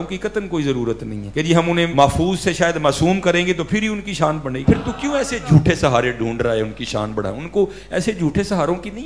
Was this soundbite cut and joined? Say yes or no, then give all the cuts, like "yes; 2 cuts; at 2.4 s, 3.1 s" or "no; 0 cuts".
yes; 2 cuts; at 1.6 s, 4.6 s